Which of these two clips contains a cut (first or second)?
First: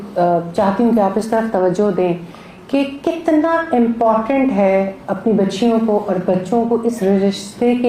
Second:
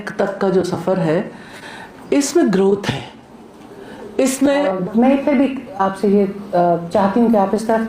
second